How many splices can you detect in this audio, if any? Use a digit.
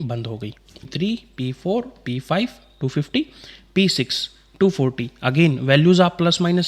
1